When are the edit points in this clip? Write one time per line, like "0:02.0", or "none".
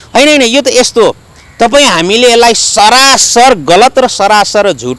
none